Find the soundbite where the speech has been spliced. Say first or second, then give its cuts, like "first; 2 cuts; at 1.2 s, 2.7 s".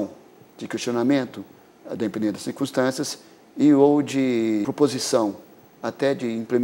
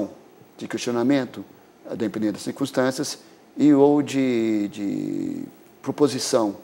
first; 1 cut; at 4.6 s